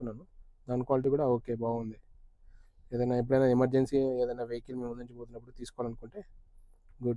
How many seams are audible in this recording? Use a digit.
0